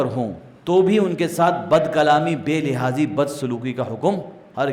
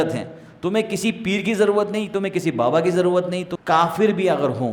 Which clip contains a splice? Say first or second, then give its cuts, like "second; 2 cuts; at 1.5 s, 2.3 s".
second; 1 cut; at 3.5 s